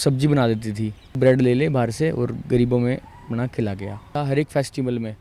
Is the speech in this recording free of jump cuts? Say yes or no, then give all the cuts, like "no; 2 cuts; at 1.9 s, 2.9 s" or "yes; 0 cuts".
no; 2 cuts; at 1.1 s, 4.1 s